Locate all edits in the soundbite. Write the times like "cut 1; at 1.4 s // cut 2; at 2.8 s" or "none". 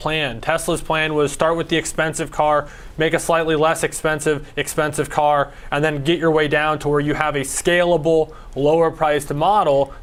none